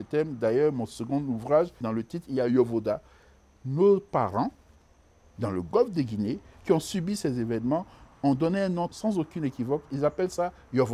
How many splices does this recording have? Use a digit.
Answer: 2